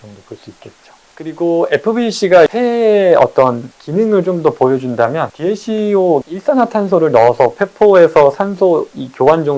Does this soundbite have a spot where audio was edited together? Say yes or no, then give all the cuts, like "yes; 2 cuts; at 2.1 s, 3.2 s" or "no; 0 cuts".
no; 0 cuts